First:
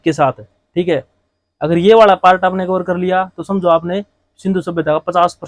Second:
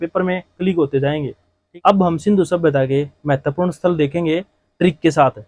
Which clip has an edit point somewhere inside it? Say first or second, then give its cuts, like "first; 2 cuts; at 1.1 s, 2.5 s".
second; 1 cut; at 1.5 s